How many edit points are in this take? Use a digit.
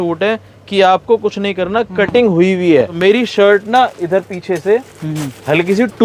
1